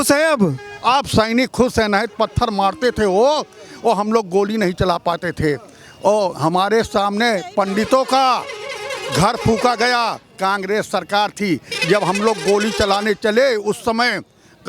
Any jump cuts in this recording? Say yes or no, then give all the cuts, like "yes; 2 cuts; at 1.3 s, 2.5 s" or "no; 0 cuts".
no; 0 cuts